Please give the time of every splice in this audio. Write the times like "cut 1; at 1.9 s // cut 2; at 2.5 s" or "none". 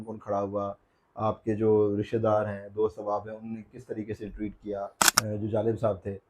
cut 1; at 5.0 s